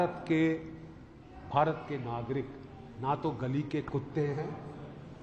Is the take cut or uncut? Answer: uncut